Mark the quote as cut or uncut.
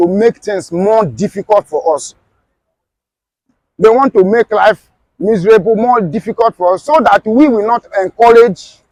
uncut